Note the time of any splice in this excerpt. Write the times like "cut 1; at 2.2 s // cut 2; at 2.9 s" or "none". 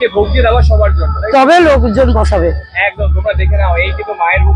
none